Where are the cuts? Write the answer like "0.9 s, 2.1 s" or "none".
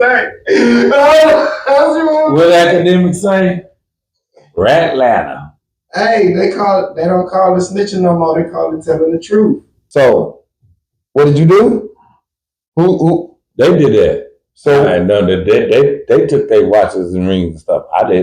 9.7 s